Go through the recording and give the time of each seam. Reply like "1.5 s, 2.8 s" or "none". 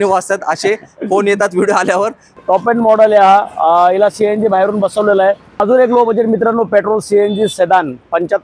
2.3 s, 5.6 s